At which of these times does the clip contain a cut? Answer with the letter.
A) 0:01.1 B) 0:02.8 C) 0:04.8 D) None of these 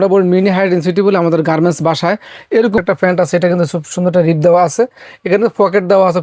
B